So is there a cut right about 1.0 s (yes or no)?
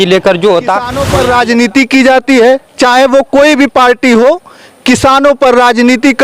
yes